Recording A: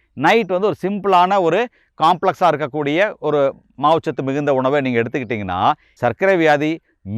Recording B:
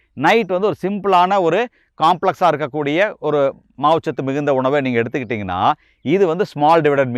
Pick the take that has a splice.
A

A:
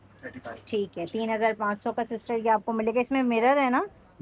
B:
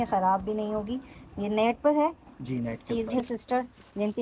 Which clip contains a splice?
B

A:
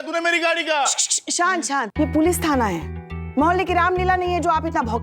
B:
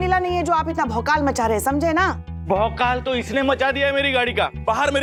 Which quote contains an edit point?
A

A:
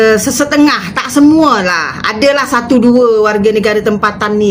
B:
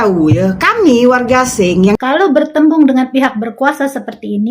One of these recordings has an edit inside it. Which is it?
B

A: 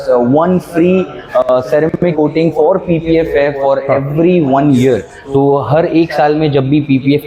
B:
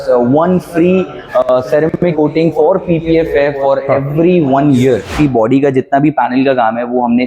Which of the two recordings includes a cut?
B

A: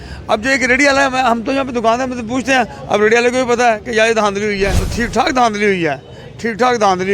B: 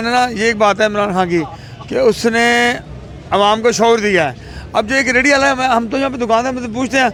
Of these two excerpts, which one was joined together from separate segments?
A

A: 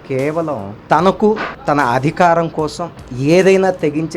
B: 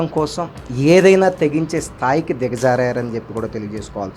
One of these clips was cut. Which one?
A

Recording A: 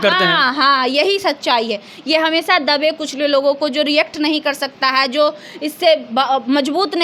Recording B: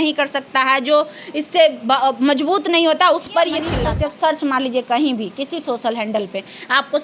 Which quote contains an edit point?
B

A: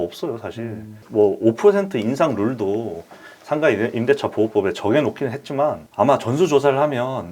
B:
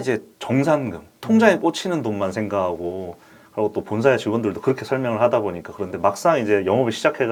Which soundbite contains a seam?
A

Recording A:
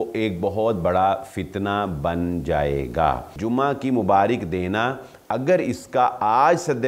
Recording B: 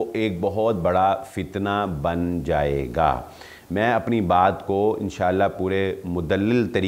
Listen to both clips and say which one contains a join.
A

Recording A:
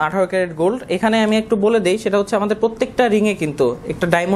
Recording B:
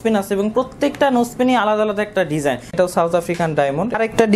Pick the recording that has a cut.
B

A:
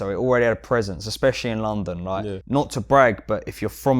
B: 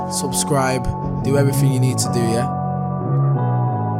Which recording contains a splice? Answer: A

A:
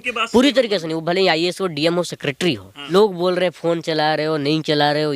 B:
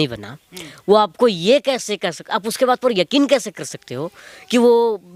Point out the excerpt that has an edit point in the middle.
A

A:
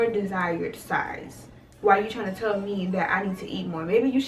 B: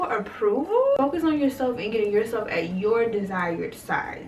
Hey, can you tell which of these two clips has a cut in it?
B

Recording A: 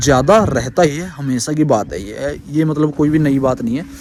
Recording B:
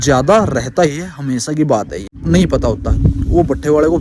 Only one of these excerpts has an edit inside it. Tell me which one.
B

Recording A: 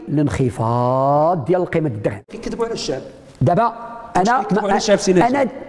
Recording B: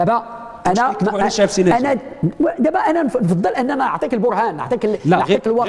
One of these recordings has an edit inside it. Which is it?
A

